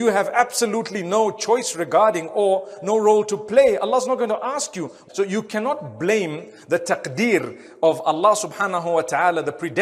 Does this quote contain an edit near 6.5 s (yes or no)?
no